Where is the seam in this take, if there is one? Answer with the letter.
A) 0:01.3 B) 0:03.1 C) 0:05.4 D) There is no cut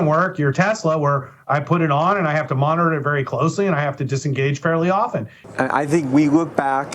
C